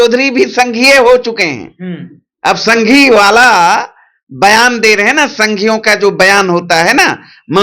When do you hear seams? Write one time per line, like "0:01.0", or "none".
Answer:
none